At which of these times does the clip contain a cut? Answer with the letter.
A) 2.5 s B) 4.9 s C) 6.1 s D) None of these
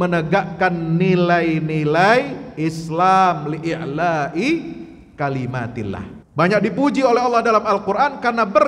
C